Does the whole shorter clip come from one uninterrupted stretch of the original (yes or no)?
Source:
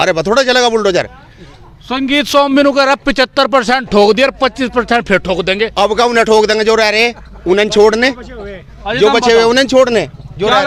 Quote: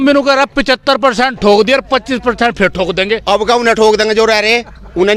yes